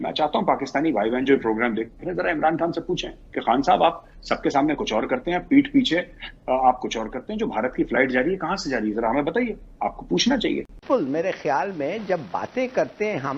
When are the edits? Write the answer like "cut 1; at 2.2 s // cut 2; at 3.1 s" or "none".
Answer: cut 1; at 10.8 s